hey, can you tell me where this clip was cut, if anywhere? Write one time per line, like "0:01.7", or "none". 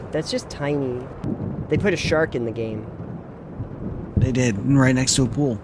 0:01.2